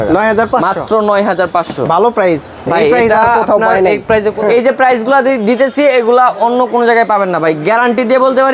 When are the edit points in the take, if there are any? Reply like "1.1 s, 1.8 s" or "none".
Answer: 4.3 s